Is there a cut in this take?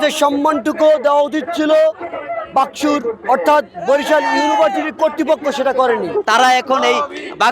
yes; 1 cut; at 6.1 s

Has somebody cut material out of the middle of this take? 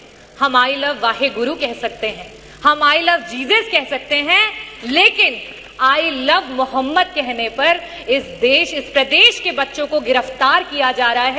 no; 0 cuts

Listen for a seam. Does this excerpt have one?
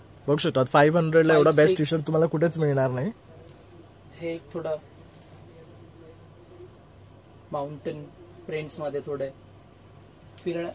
no; 0 cuts

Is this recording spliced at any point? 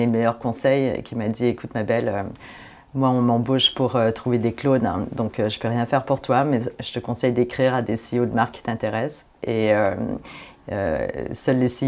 no; 0 cuts

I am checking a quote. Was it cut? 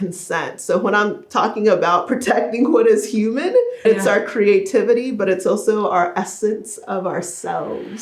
yes; 1 cut; at 3.8 s

